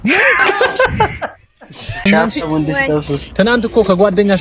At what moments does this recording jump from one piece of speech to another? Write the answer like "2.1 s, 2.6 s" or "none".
2.1 s